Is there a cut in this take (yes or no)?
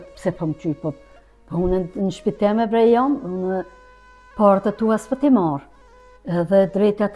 no